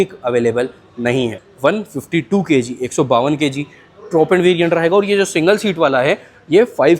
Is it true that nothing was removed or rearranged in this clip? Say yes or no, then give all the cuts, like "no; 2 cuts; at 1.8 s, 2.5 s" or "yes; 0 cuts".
no; 1 cut; at 1.4 s